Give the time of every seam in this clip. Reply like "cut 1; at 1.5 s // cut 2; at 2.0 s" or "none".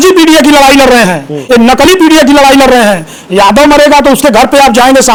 none